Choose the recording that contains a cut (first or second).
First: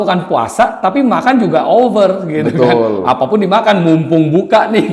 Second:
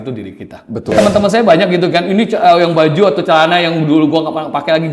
second